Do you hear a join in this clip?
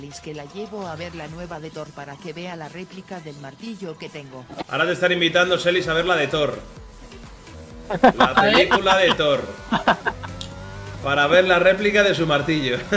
yes; 1 cut; at 4.7 s

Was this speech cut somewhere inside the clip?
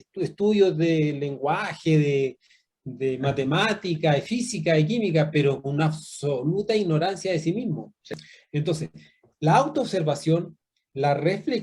yes; 1 cut; at 8.1 s

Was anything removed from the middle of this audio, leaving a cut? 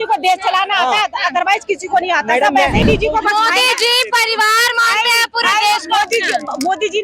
yes; 1 cut; at 2.9 s

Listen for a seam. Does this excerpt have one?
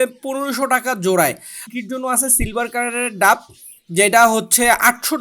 yes; 1 cut; at 1.6 s

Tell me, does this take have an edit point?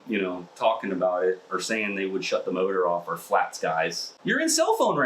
yes; 1 cut; at 4.1 s

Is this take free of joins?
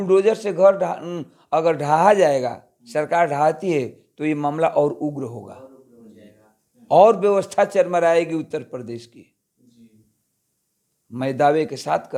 yes; 0 cuts

